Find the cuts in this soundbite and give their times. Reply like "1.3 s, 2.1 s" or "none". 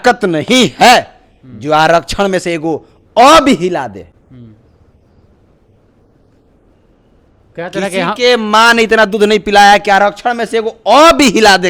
none